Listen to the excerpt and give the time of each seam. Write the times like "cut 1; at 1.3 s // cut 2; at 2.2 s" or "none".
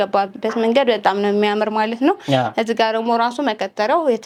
none